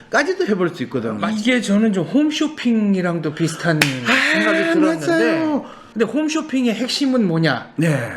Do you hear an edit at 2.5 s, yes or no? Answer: no